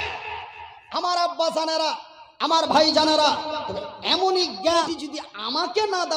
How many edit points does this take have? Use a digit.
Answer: 1